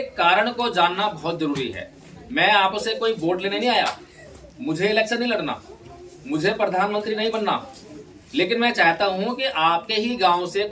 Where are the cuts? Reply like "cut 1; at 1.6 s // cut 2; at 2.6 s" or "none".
none